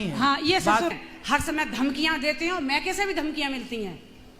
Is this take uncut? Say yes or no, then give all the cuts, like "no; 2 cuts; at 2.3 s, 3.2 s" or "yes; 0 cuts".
no; 1 cut; at 1.0 s